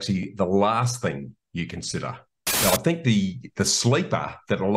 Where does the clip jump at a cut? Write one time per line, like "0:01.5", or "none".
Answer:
0:02.6